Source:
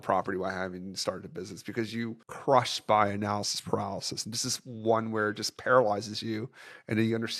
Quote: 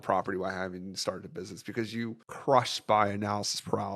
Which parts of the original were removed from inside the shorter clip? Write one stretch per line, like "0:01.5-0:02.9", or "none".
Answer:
none